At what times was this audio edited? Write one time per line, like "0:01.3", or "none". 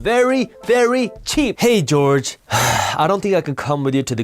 0:02.4